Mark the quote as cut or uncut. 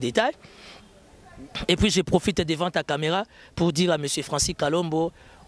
uncut